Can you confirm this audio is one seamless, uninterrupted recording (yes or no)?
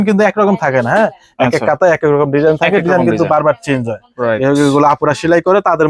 yes